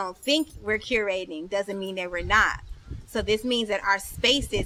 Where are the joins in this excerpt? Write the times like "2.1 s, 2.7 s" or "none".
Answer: none